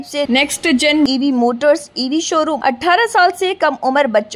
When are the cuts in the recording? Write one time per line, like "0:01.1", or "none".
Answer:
0:02.6